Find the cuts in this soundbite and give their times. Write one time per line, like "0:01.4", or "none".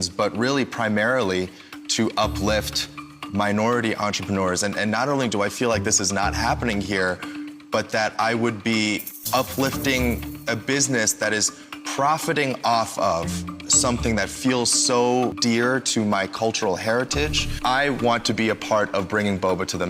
0:05.3
0:09.1
0:15.4
0:17.5